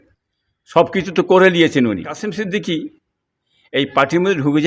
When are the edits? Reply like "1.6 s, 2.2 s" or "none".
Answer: 2.3 s